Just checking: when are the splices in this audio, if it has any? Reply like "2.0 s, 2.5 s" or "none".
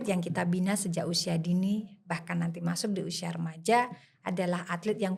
none